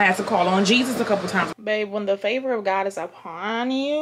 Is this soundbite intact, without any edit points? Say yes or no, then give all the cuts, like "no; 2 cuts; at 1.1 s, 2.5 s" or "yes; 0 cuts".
no; 1 cut; at 1.5 s